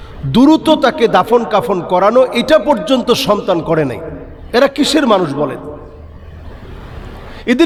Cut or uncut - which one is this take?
uncut